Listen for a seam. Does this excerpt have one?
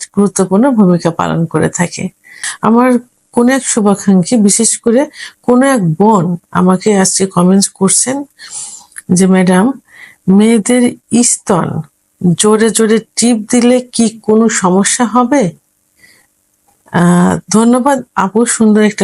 yes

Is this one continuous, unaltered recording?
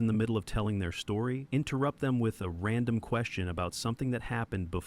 no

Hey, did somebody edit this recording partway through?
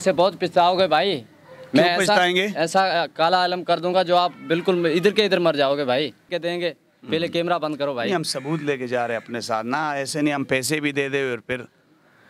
yes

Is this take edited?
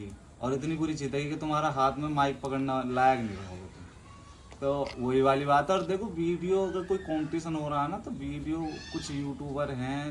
no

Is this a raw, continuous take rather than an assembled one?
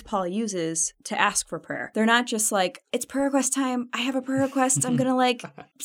no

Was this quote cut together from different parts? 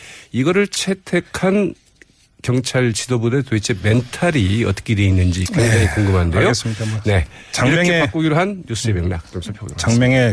no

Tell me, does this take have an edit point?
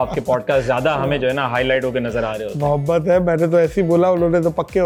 no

